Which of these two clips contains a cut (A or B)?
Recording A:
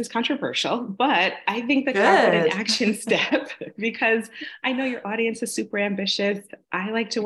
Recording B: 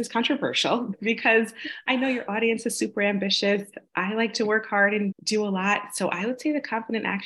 B